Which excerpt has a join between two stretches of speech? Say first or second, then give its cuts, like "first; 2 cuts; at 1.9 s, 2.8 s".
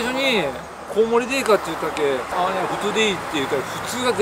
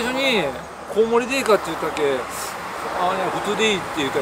first; 1 cut; at 2.3 s